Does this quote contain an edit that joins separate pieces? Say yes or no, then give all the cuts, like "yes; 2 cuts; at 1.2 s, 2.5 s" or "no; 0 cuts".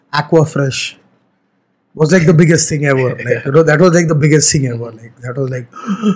no; 0 cuts